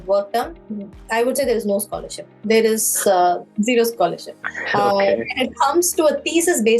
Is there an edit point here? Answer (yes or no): no